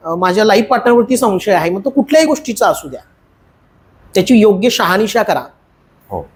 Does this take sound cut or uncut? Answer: uncut